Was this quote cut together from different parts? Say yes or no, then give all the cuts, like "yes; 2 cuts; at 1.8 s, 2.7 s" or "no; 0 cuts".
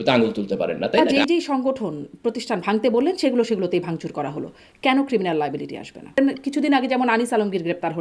yes; 2 cuts; at 1.1 s, 6.2 s